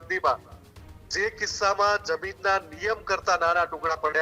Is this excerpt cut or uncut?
uncut